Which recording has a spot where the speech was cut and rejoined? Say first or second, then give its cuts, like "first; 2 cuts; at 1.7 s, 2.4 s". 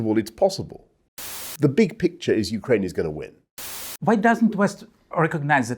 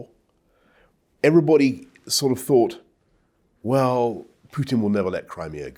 first; 2 cuts; at 1.5 s, 3.7 s